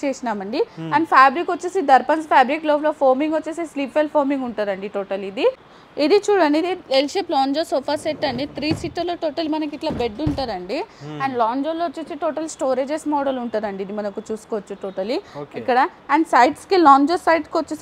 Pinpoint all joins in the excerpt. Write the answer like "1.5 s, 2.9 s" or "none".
5.7 s

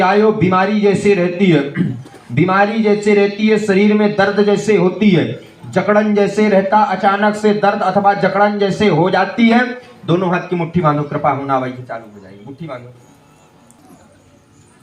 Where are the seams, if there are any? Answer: 13.7 s

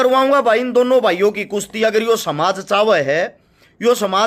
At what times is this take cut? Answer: none

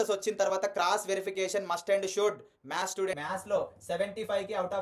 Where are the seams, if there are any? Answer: 3.1 s

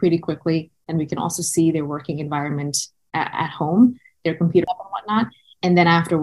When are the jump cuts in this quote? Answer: 4.4 s

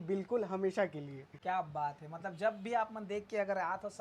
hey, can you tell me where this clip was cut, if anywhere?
none

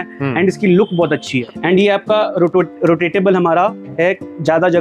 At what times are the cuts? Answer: 1.4 s

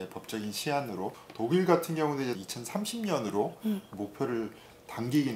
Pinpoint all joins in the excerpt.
1.2 s, 2.4 s

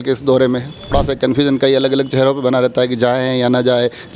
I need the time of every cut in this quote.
0.9 s

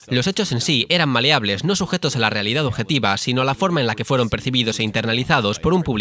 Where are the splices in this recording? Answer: 4.9 s

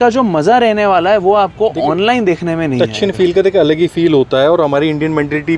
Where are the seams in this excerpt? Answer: none

